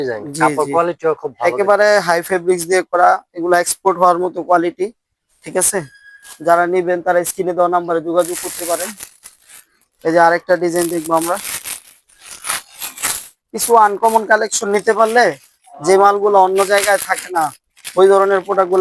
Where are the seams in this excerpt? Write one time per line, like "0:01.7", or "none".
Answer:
none